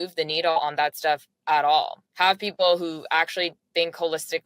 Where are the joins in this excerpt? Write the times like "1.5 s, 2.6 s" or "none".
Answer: 2.0 s